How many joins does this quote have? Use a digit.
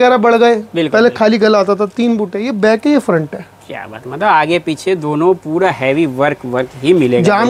0